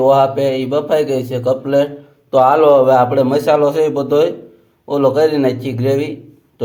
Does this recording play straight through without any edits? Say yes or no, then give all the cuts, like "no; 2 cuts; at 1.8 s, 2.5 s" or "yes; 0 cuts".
yes; 0 cuts